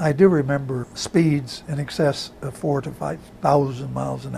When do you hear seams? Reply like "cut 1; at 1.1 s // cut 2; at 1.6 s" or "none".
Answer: cut 1; at 0.9 s